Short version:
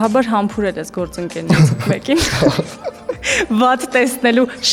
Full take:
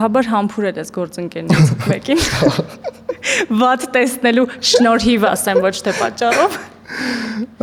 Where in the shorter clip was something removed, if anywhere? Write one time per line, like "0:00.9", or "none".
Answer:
none